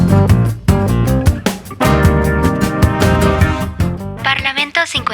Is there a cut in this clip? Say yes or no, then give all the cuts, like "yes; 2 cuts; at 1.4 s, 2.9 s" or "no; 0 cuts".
yes; 1 cut; at 4.2 s